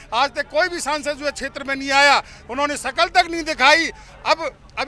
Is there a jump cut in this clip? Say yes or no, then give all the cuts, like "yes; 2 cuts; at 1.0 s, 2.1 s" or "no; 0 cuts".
no; 0 cuts